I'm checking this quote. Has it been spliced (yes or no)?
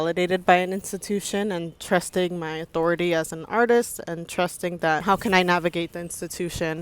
yes